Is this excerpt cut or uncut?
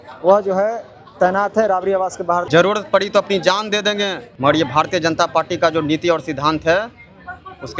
cut